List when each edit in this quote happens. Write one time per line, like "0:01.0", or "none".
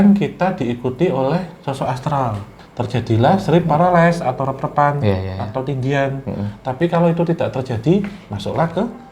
0:02.5